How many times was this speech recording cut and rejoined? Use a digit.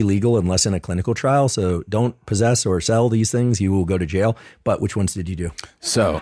0